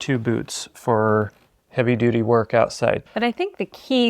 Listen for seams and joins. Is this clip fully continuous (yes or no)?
no